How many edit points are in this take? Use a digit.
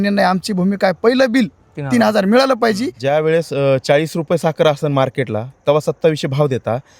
1